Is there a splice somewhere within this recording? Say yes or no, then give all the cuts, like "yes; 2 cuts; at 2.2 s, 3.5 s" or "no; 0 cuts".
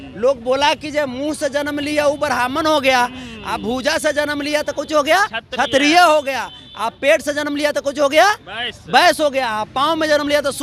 no; 0 cuts